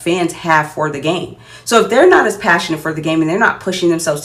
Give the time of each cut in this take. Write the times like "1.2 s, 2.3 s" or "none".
none